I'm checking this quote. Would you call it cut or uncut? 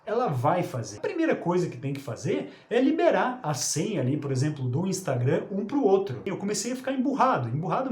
cut